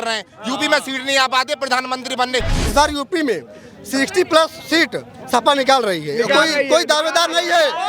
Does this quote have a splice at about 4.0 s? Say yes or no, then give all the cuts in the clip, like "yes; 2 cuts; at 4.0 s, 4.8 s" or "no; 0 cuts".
no; 1 cut; at 2.6 s